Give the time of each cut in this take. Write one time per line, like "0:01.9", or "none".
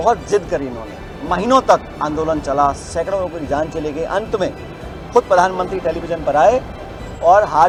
none